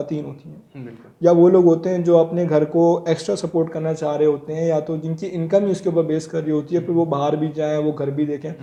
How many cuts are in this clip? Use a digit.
0